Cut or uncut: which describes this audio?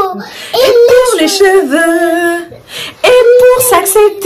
uncut